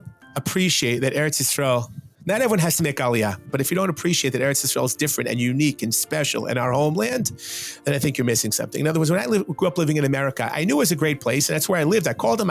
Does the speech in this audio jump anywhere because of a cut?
no; 0 cuts

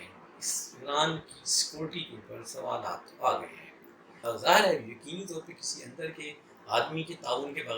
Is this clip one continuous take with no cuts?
no; 1 cut; at 4.2 s

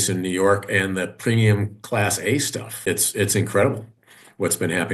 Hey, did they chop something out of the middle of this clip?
yes; 1 cut; at 2.8 s

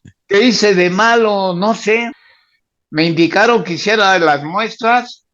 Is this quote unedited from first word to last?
no; 1 cut; at 2.2 s

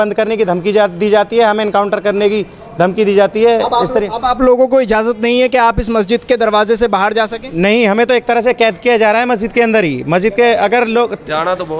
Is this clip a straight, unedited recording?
yes; 0 cuts

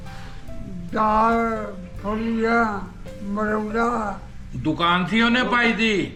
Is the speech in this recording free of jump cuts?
yes; 0 cuts

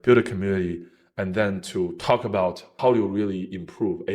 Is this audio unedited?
no; 1 cut; at 2.7 s

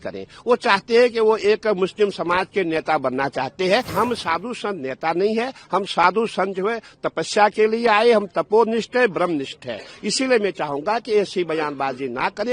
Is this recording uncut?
no; 1 cut; at 3.9 s

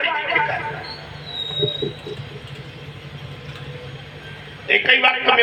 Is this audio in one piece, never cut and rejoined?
yes; 0 cuts

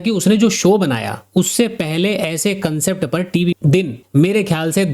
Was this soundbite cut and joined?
yes; 1 cut; at 3.6 s

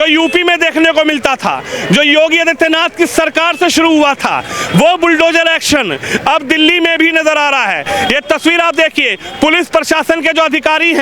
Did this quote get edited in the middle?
no; 0 cuts

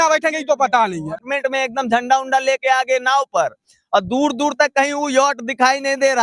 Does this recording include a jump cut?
yes; 1 cut; at 1.3 s

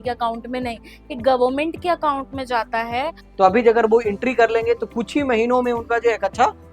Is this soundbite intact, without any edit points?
no; 1 cut; at 3.2 s

